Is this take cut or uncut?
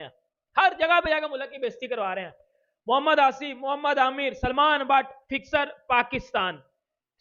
uncut